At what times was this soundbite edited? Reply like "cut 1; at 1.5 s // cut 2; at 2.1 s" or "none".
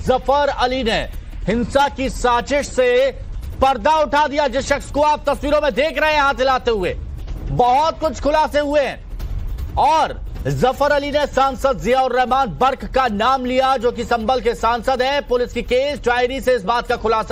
none